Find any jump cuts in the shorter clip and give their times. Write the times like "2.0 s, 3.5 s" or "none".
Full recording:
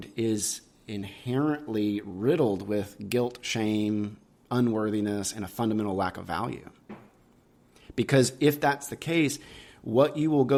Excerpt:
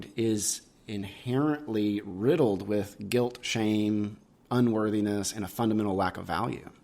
none